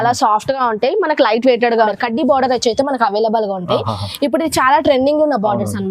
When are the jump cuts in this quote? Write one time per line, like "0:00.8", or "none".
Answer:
0:01.9